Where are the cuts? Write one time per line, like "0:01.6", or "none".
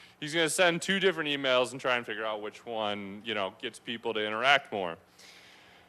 0:01.1

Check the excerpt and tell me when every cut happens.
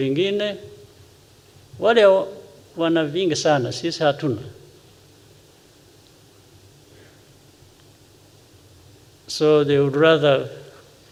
none

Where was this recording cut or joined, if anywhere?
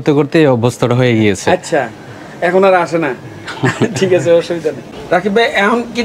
0:04.9

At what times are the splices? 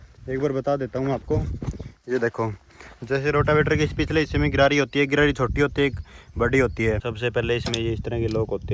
0:07.1

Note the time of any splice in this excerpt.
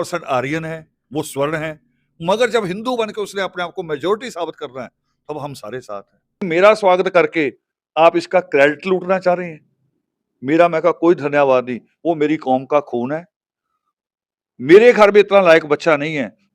0:06.5

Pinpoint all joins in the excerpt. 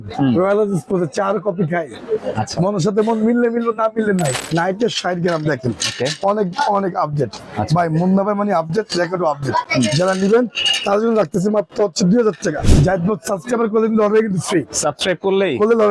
0:04.4
0:12.6

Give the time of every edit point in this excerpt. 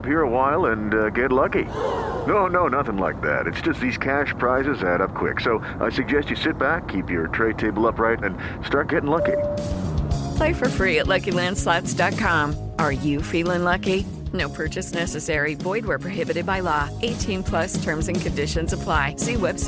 none

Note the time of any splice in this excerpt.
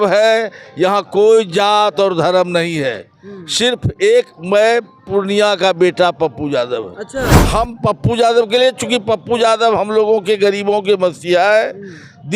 0:07.2

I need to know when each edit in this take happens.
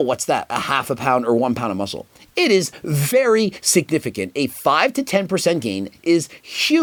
none

